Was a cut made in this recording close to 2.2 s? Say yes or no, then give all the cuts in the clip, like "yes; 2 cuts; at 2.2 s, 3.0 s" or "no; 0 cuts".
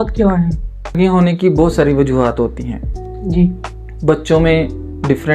no; 1 cut; at 0.9 s